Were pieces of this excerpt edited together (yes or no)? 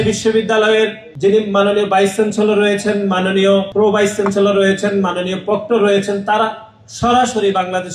yes